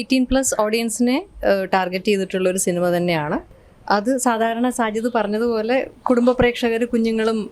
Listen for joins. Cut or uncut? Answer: uncut